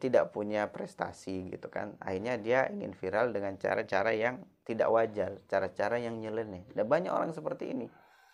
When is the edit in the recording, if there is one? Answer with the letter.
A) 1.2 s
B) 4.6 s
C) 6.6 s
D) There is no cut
D